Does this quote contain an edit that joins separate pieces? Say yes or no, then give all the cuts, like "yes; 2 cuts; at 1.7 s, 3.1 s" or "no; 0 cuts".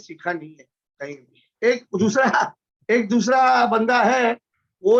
no; 0 cuts